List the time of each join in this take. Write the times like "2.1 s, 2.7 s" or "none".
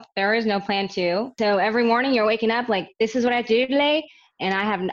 1.4 s